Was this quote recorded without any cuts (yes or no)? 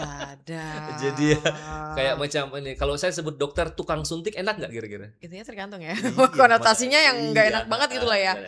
yes